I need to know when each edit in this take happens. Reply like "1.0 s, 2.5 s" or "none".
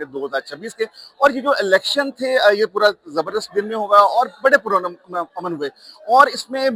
none